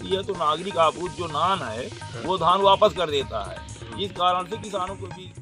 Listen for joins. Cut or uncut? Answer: uncut